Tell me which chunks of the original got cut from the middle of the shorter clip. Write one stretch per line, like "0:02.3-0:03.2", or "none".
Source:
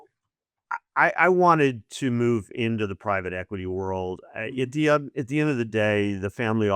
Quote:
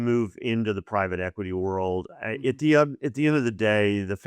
none